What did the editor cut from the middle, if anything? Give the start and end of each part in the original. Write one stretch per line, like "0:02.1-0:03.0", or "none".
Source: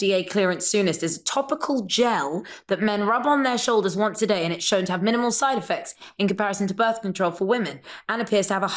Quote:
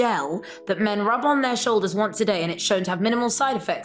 none